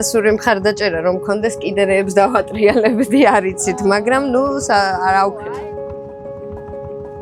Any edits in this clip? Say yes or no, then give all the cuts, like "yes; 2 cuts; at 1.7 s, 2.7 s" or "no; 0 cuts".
no; 0 cuts